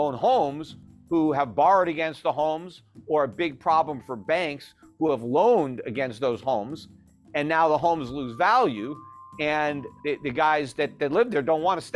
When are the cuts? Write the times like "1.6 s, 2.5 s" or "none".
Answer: 9.9 s